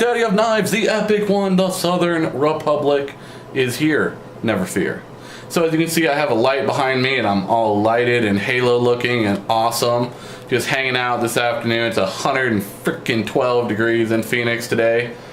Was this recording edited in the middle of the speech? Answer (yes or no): no